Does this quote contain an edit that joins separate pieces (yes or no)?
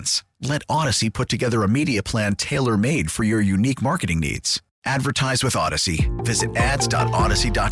no